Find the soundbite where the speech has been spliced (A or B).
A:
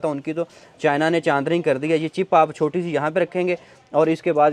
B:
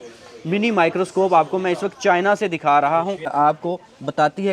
B